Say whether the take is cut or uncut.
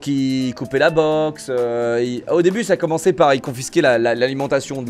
uncut